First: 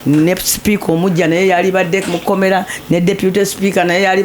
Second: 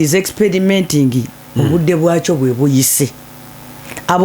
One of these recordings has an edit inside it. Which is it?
second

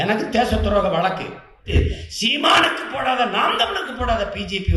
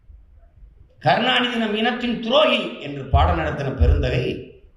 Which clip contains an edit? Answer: first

